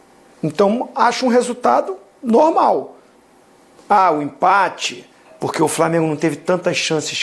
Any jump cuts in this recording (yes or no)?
no